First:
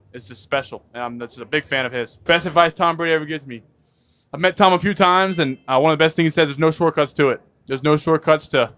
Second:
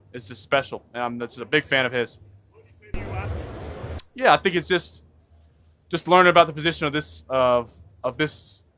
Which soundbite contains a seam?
first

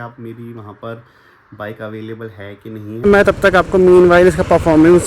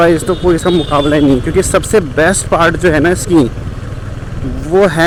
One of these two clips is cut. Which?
first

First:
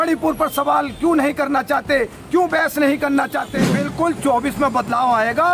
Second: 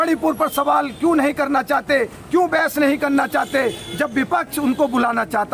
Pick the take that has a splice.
first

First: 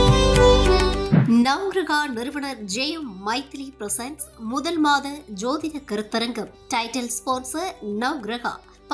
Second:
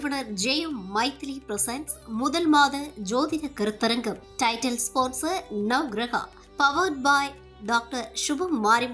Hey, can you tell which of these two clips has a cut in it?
first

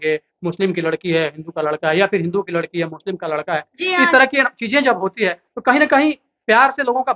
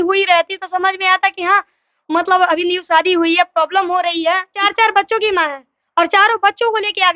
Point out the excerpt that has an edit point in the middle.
second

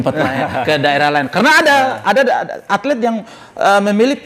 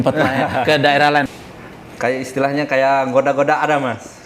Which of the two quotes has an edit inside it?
second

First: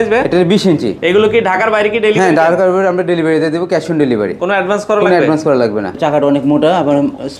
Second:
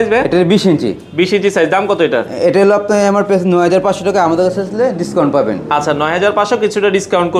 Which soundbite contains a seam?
first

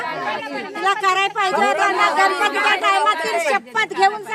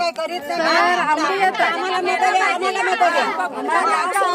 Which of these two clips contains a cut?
second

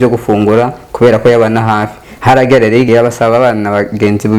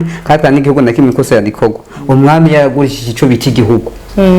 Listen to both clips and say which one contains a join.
first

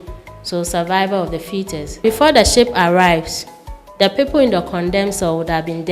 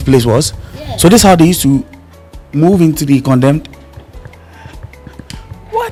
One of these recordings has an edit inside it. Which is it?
first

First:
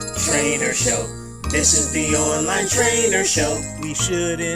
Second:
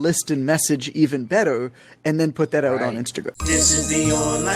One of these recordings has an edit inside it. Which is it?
second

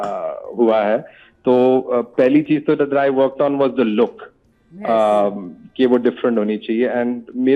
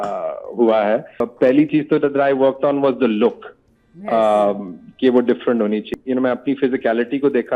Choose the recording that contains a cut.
second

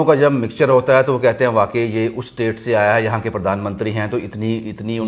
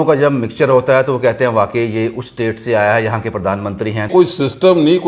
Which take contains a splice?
second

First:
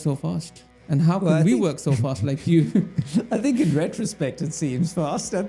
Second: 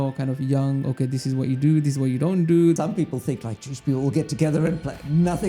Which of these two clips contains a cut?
second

